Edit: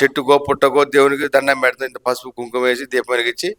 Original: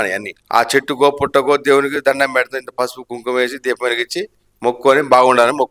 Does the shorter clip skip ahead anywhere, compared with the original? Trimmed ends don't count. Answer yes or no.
no